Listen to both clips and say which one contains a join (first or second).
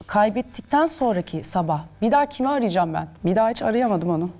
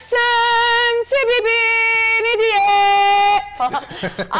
first